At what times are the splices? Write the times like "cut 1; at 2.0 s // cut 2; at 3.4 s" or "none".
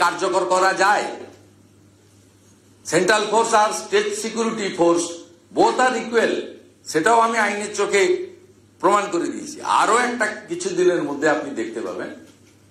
none